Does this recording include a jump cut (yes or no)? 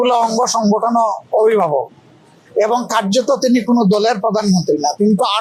no